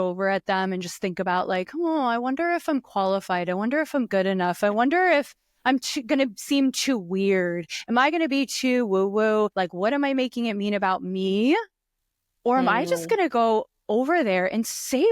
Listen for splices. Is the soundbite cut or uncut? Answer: cut